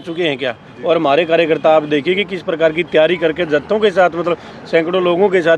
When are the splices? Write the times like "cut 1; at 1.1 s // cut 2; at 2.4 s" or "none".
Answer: none

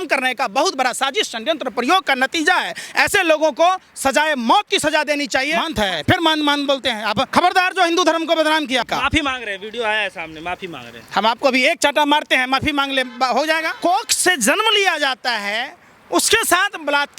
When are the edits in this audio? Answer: cut 1; at 5.6 s // cut 2; at 7.3 s // cut 3; at 8.8 s // cut 4; at 13.7 s

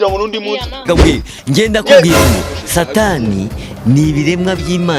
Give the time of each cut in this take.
none

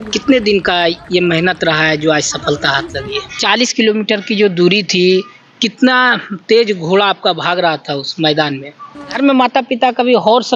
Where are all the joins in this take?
cut 1; at 3.3 s // cut 2; at 9.1 s

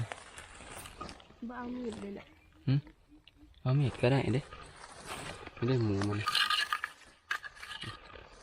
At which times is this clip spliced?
none

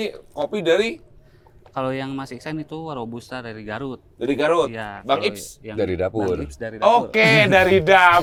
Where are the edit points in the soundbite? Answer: none

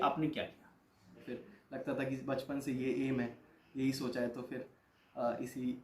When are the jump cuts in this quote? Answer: cut 1; at 1.2 s

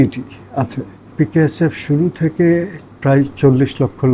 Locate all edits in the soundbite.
cut 1; at 1.1 s

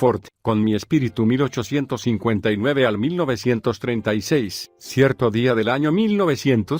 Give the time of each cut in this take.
none

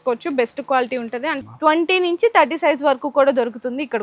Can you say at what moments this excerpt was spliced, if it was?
cut 1; at 1.4 s

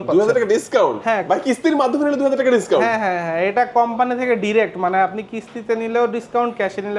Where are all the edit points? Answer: none

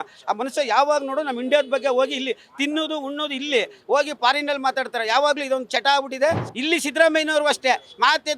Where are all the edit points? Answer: cut 1; at 6.5 s

